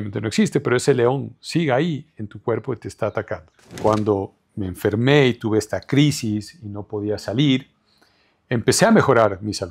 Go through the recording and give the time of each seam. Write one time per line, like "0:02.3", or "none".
0:03.8